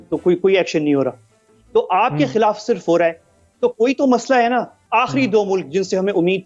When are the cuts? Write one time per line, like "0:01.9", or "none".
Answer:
0:04.8

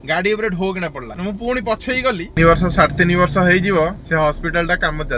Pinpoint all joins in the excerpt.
0:02.4

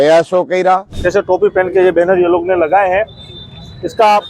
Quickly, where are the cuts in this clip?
0:01.0

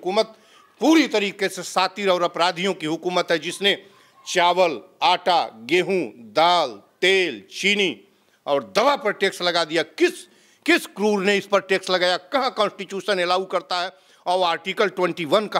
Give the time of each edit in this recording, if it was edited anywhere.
none

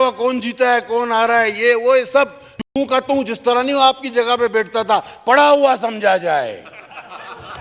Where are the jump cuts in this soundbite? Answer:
none

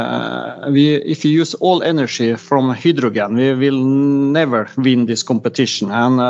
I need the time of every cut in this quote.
none

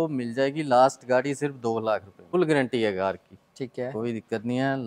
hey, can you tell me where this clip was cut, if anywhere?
0:02.3

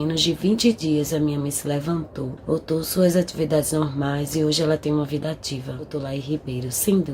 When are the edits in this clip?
0:02.4
0:05.9

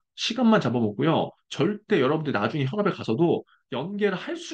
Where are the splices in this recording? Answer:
none

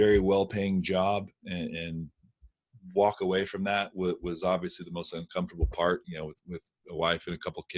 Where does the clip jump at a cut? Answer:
none

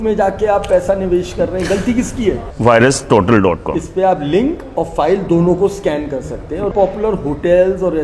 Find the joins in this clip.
0:02.4
0:06.7

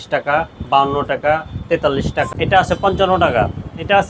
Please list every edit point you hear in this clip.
0:02.2

